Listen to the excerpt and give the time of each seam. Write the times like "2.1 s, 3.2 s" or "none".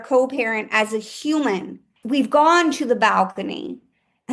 1.9 s